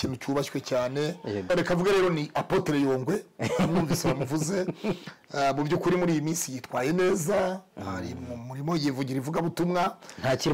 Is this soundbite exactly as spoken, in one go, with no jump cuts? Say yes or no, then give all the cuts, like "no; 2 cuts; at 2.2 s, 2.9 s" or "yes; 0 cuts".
no; 1 cut; at 1.5 s